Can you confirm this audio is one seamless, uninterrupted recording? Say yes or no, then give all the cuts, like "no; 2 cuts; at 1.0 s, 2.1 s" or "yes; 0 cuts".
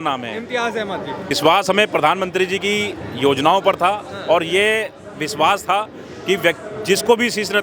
no; 1 cut; at 1.3 s